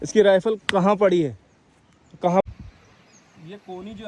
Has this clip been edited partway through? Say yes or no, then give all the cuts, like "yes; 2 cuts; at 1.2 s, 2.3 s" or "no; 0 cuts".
yes; 1 cut; at 2.4 s